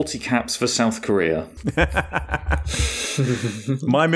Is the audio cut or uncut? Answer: cut